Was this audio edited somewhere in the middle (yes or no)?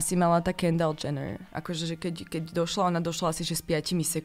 no